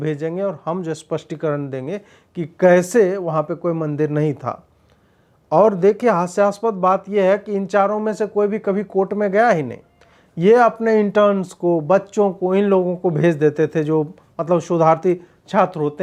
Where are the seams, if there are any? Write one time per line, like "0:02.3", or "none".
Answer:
none